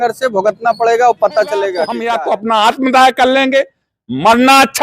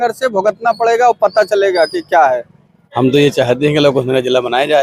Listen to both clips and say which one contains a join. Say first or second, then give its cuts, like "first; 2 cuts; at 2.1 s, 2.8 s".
first; 1 cut; at 1.9 s